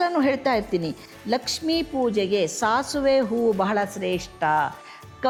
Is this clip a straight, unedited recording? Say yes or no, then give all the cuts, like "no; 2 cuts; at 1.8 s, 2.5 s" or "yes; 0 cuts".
yes; 0 cuts